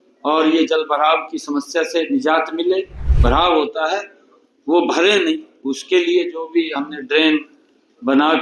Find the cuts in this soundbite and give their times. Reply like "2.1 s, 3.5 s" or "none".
3.0 s